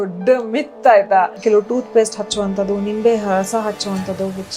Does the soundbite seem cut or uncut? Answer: cut